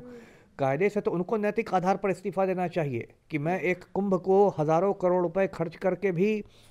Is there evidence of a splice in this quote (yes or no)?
no